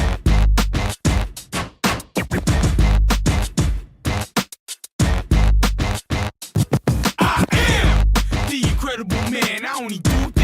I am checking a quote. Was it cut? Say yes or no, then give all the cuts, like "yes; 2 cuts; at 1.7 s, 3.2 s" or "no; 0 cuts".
yes; 1 cut; at 1.0 s